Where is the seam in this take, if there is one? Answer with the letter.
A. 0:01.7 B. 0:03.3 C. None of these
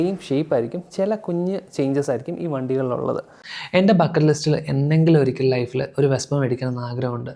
B